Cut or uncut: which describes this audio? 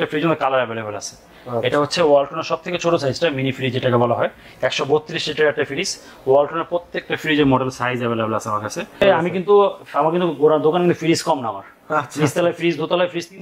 cut